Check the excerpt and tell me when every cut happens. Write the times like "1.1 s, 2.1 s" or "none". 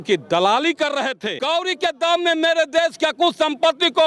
1.3 s